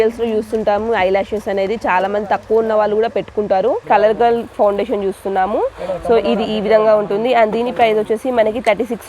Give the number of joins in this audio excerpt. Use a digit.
1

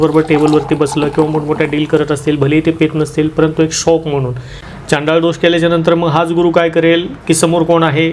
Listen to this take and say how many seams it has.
1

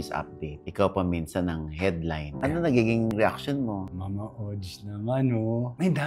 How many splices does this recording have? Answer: 2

